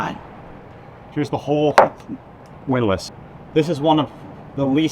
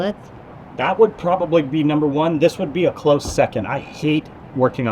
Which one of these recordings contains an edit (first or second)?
first